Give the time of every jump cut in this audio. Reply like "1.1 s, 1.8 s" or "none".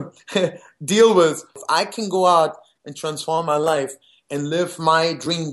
1.5 s